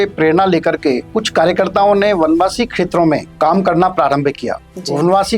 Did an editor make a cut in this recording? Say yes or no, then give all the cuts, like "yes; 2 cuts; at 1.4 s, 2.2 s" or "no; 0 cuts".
yes; 2 cuts; at 1.1 s, 3.3 s